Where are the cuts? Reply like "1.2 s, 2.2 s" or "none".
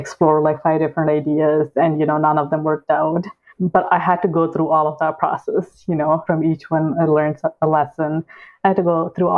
3.5 s, 6.2 s